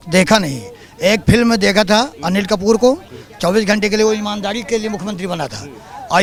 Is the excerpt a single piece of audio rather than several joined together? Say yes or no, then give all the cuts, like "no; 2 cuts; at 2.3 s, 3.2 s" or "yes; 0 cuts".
yes; 0 cuts